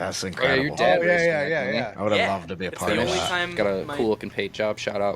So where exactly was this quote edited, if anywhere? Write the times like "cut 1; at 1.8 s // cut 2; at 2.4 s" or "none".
cut 1; at 3.5 s